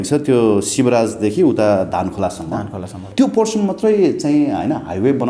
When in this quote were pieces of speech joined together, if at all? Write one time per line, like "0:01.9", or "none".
0:03.0

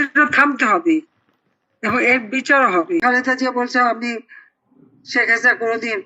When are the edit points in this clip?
0:03.0

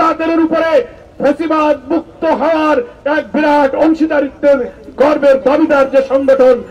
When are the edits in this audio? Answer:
none

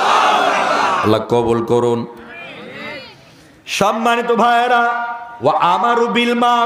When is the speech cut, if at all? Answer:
none

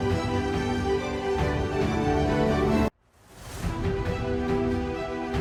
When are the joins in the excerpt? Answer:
none

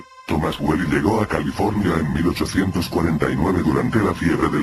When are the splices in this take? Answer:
none

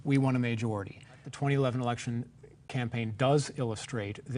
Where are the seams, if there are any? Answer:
0:01.3

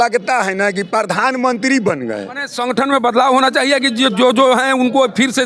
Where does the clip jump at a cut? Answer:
0:02.5

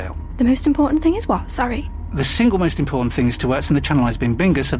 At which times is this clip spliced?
none

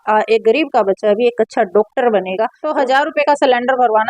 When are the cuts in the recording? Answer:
0:02.8

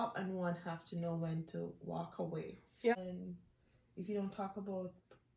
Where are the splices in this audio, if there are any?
0:02.9

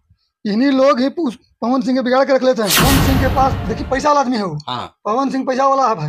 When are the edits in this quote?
0:02.8

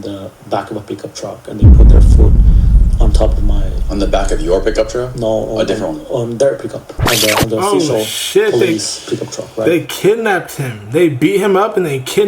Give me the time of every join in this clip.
none

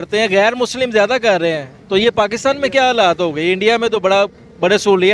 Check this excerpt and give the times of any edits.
none

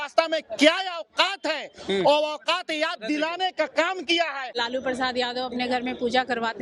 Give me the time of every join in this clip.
0:04.5

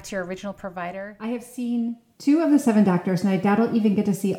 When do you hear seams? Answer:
0:01.0

